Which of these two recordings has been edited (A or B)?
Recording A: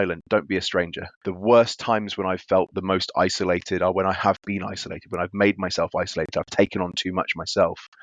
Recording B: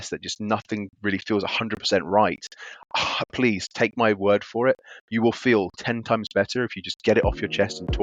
A